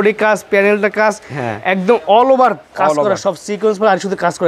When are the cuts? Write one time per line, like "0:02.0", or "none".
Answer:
none